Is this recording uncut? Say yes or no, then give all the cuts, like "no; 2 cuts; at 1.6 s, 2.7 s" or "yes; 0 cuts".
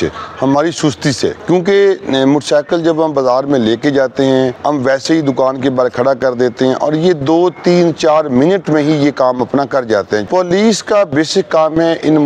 no; 3 cuts; at 1.4 s, 4.6 s, 10.2 s